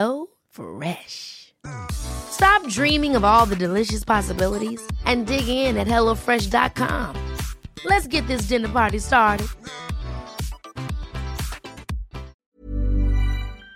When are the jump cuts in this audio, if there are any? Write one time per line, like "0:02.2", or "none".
0:12.3